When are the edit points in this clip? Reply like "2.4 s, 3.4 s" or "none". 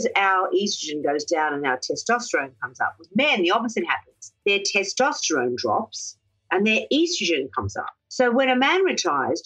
none